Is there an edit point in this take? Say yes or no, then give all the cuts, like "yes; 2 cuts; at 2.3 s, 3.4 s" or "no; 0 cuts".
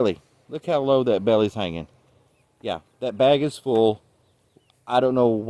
no; 0 cuts